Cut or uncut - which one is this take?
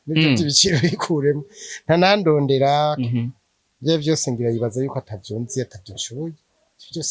uncut